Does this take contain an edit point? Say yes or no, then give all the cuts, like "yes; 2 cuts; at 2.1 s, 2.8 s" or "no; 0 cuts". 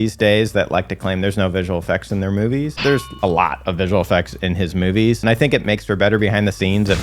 yes; 2 cuts; at 2.7 s, 5.2 s